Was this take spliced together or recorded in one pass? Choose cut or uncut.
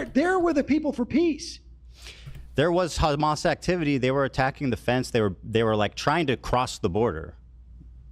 uncut